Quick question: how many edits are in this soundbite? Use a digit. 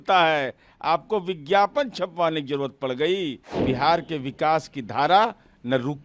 1